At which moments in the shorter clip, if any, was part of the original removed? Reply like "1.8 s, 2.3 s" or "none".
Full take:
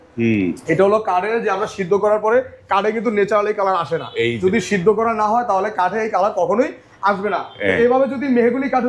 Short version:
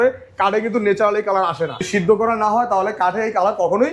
1.8 s